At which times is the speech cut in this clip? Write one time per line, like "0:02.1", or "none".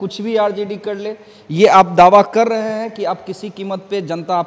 none